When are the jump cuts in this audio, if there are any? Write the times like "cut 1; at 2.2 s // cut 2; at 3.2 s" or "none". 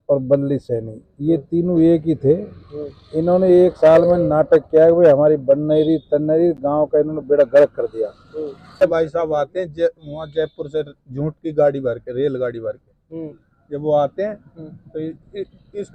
cut 1; at 8.8 s